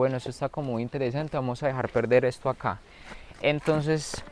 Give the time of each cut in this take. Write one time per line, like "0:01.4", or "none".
none